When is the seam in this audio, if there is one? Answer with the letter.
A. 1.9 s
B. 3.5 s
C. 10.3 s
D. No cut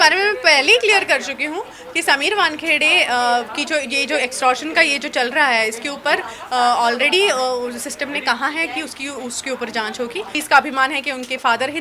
C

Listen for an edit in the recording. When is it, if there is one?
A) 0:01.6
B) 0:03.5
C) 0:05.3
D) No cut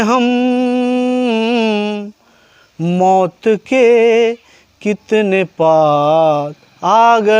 D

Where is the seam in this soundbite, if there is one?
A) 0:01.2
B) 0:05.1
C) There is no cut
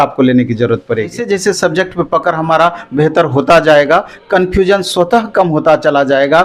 A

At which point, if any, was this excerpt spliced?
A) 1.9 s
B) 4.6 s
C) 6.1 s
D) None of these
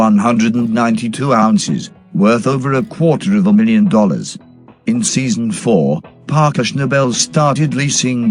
C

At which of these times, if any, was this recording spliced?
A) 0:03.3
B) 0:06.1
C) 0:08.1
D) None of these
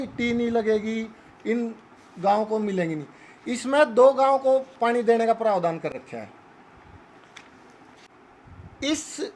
C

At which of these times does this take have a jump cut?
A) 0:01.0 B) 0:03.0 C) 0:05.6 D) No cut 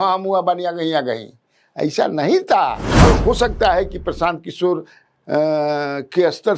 B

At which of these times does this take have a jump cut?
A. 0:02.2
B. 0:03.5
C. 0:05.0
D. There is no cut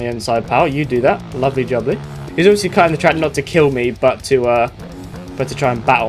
A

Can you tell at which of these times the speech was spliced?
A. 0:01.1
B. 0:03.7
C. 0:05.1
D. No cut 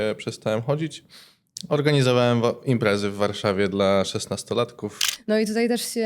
C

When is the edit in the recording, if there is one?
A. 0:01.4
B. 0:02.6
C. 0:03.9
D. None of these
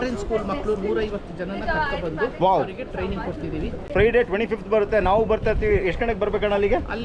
C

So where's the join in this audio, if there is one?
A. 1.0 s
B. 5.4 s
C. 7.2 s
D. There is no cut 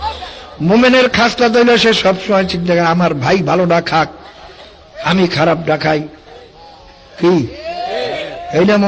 D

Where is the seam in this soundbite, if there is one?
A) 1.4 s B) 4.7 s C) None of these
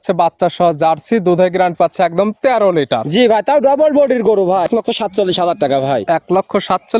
B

